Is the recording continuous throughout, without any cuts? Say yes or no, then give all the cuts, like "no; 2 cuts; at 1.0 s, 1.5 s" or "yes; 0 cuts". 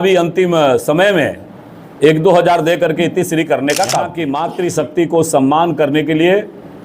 no; 1 cut; at 4.2 s